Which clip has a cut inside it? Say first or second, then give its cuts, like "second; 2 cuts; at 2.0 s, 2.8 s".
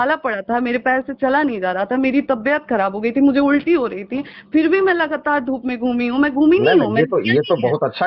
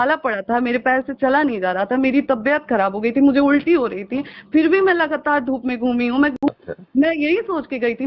second; 1 cut; at 6.3 s